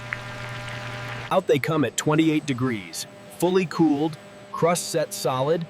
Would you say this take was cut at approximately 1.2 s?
yes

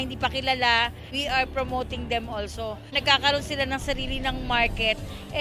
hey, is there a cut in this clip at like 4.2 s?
no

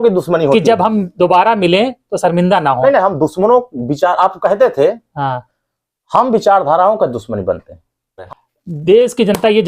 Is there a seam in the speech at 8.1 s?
yes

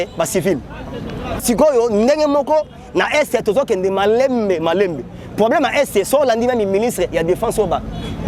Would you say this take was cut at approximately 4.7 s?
no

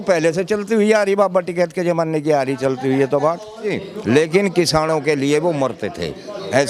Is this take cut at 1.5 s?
no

